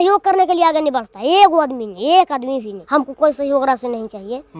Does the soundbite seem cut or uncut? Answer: cut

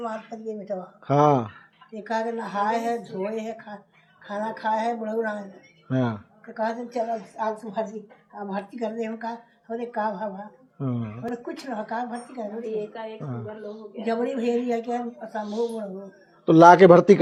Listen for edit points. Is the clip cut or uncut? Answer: uncut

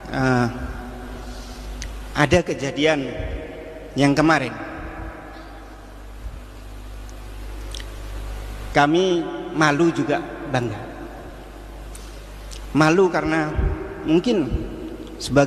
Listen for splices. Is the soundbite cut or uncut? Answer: cut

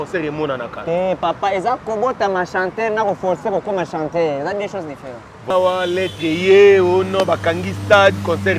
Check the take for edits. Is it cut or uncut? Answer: cut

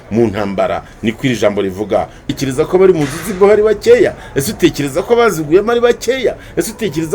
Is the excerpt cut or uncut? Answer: cut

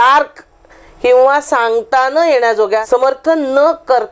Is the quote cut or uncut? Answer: cut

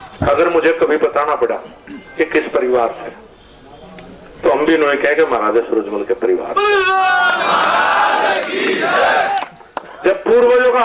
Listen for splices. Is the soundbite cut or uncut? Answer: uncut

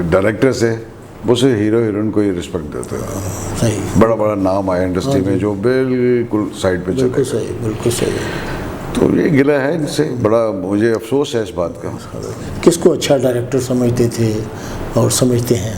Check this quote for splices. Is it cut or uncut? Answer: uncut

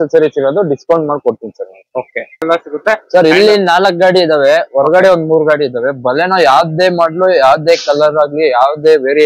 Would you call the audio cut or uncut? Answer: cut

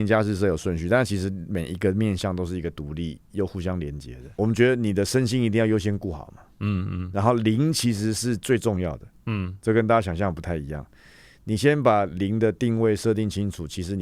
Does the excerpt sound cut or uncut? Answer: cut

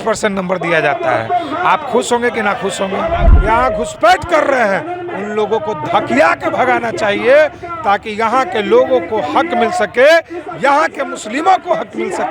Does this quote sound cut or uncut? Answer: cut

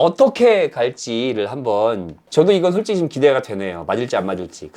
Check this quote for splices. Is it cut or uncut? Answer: cut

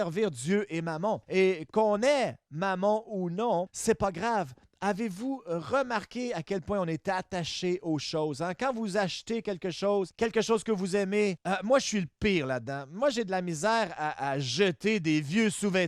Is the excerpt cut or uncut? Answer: cut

